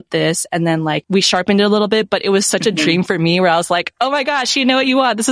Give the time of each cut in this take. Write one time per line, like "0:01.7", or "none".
0:01.0